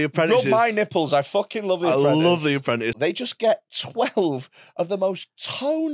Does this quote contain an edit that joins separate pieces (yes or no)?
yes